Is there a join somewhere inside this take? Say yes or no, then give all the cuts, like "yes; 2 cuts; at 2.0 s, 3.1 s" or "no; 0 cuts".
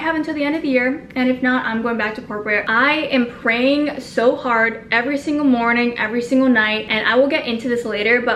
no; 0 cuts